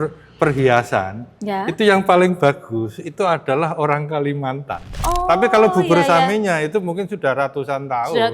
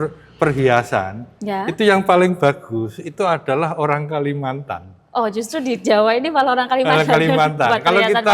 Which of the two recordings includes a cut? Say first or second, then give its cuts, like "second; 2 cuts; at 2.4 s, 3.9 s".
first; 1 cut; at 5.0 s